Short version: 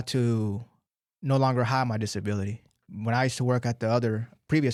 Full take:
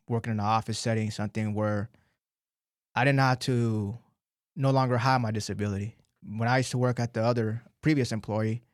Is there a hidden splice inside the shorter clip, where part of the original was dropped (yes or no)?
no